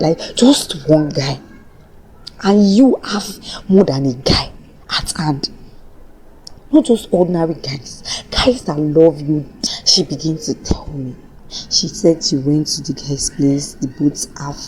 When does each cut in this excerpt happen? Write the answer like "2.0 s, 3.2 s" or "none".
9.5 s